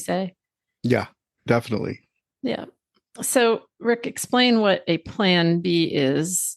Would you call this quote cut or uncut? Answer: cut